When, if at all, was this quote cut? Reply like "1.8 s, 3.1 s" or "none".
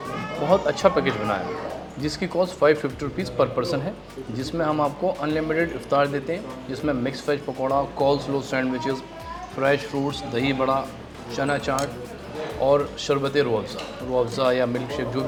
none